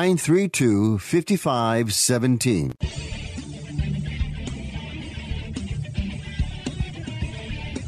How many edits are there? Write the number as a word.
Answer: one